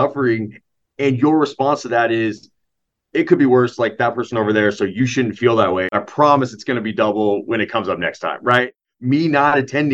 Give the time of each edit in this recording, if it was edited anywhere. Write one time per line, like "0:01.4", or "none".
0:06.0
0:08.7